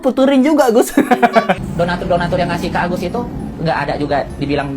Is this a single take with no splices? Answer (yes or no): no